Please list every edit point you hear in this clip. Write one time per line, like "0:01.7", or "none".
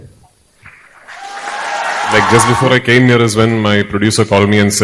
0:02.2